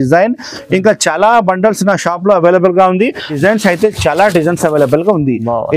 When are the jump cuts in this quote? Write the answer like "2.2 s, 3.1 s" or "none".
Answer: 3.3 s